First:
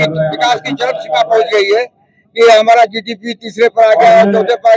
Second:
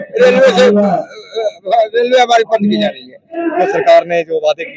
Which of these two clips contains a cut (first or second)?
second